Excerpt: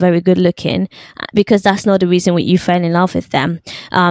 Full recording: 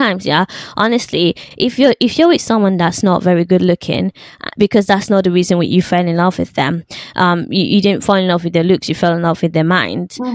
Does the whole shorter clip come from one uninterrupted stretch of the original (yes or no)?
yes